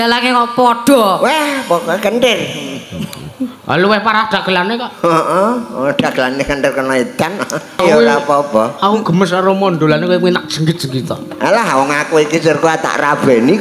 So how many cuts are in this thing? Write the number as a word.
one